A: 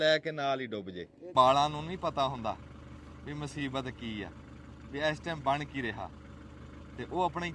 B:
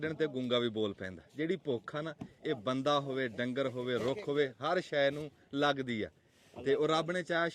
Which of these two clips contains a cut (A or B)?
A